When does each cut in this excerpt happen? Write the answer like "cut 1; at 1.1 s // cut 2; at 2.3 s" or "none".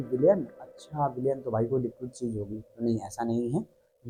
none